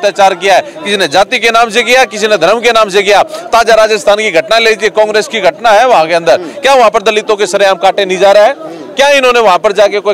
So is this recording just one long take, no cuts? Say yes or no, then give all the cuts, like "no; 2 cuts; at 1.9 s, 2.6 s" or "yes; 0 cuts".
yes; 0 cuts